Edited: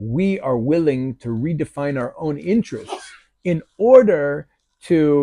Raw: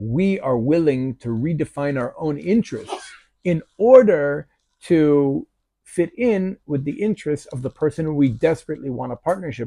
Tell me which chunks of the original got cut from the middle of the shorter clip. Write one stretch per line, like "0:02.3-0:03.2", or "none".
none

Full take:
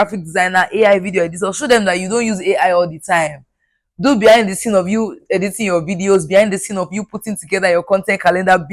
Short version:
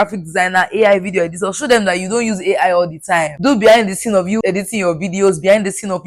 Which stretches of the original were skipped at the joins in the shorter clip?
0:03.3-0:03.9
0:05.0-0:05.3

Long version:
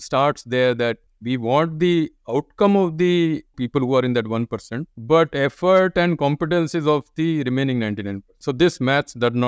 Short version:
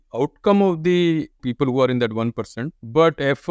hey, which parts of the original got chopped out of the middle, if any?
none

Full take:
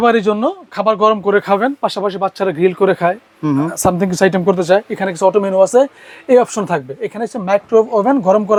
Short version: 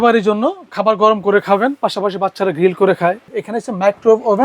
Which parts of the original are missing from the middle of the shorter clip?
0:03.3-0:07.0

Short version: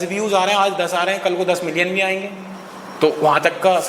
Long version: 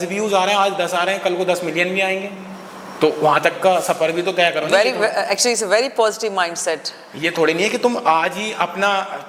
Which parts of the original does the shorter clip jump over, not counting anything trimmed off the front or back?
none

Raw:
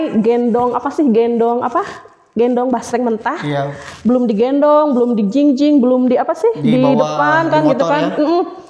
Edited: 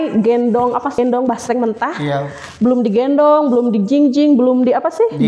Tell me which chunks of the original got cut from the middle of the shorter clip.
0:01.0-0:02.4

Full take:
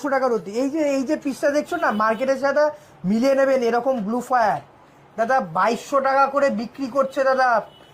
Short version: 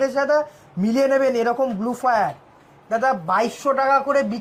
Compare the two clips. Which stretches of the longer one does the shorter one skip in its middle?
none

